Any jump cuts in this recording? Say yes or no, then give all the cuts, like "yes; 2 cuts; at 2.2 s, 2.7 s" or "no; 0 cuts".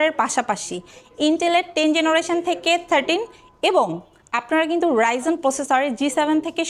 no; 0 cuts